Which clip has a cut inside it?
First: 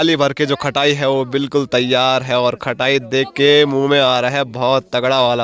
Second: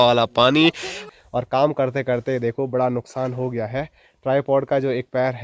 second; 1 cut; at 1.2 s

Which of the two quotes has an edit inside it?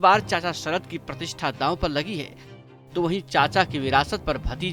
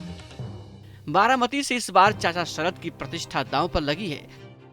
second; 1 cut; at 1.0 s

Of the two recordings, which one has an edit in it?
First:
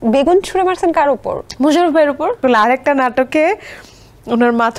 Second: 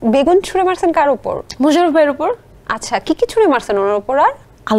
first; 1 cut; at 2.4 s

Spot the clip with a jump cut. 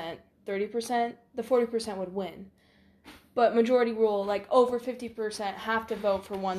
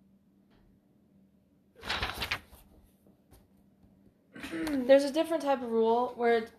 second; 1 cut; at 3.5 s

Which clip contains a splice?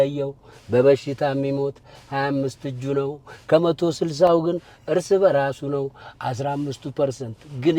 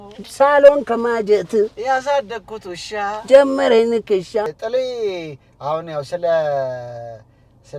second; 1 cut; at 4.5 s

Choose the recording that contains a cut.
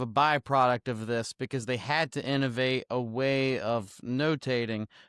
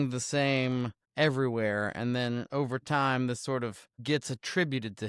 second; 2 cuts; at 1.0 s, 3.9 s

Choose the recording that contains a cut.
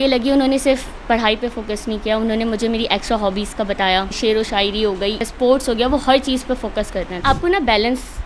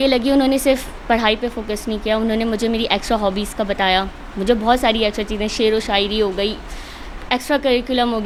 first; 3 cuts; at 4.1 s, 5.3 s, 7.1 s

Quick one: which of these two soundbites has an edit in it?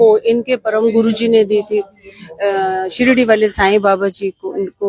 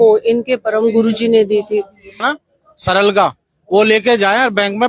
second; 1 cut; at 2.3 s

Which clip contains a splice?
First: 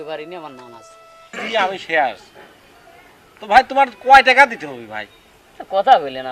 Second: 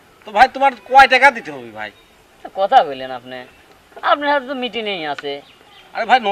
first; 1 cut; at 1.4 s

